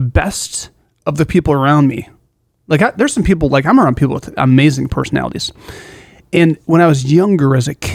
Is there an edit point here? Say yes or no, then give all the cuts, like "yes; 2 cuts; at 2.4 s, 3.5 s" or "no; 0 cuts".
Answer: no; 0 cuts